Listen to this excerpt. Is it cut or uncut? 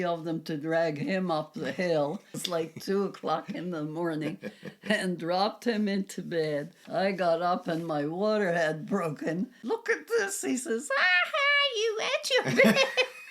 cut